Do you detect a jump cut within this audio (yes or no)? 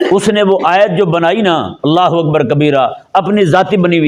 no